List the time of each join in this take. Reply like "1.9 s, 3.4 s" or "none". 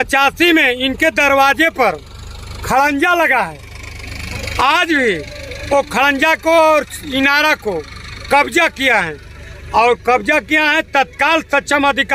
none